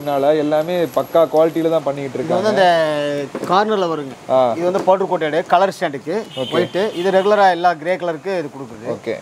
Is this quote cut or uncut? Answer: uncut